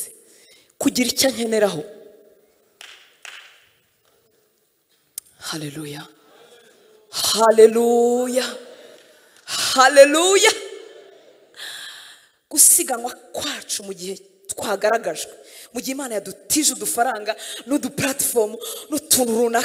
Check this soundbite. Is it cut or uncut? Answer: uncut